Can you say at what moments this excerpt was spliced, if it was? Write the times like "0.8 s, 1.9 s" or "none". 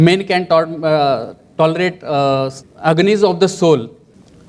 2.6 s